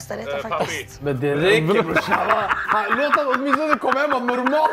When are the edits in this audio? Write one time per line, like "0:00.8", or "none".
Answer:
0:01.0